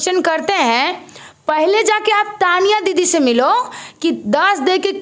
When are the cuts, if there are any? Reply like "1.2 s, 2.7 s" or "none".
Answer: none